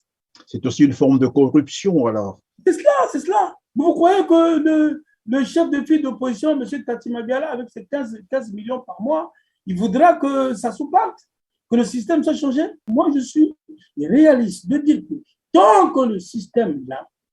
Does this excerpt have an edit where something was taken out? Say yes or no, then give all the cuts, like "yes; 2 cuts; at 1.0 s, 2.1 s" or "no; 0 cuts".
yes; 2 cuts; at 3.6 s, 12.8 s